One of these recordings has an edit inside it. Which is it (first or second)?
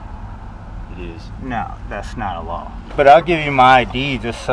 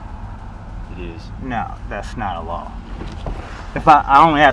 first